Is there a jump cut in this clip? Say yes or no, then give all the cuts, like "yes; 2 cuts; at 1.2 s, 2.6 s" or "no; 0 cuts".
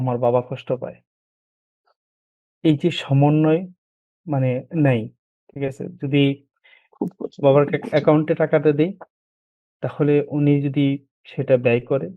no; 0 cuts